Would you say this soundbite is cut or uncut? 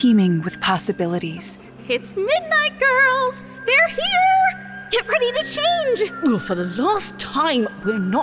uncut